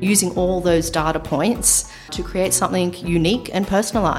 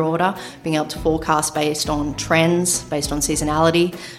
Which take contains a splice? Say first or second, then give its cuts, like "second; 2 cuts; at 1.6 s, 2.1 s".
first; 1 cut; at 2.1 s